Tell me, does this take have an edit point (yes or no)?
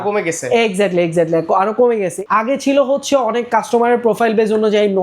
yes